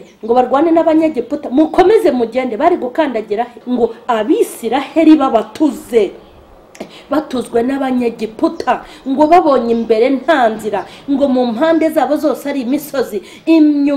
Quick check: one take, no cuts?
no; 1 cut; at 3.6 s

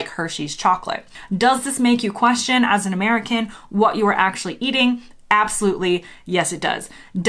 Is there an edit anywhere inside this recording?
yes; 1 cut; at 1.1 s

